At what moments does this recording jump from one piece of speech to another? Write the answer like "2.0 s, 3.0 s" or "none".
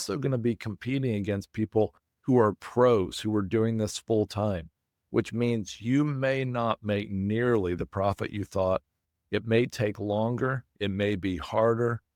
none

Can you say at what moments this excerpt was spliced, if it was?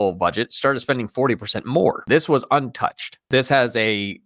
2.0 s, 3.1 s

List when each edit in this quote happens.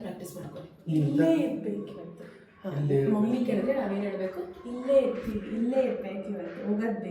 none

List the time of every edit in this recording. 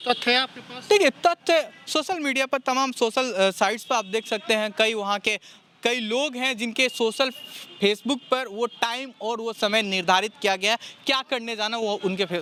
none

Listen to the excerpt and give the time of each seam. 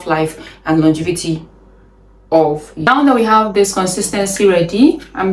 2.9 s

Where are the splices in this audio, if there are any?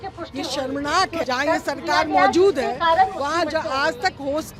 1.2 s

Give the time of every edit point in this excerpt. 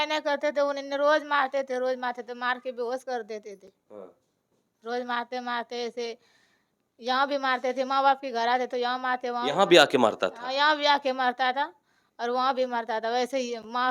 none

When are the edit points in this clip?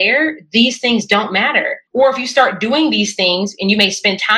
1.8 s

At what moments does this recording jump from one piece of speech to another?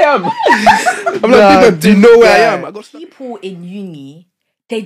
2.6 s

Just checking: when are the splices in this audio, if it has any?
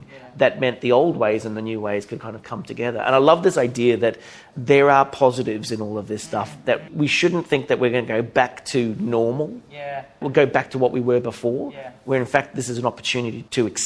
none

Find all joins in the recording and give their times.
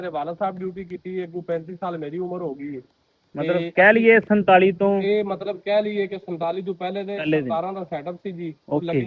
none

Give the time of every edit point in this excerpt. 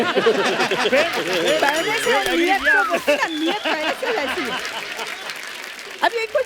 none

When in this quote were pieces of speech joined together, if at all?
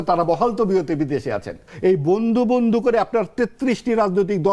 1.7 s

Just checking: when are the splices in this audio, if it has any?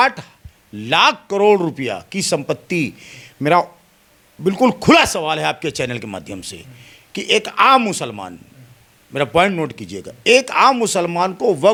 none

